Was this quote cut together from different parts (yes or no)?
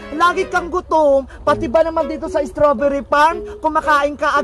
no